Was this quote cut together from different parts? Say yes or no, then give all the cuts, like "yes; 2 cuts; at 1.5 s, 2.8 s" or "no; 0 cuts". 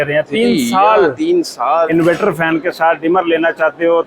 yes; 1 cut; at 1.9 s